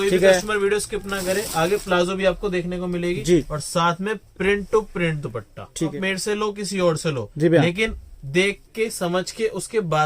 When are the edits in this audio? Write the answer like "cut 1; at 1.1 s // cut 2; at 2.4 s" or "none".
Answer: cut 1; at 3.6 s // cut 2; at 5.9 s